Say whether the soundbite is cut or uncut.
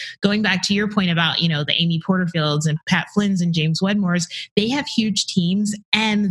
cut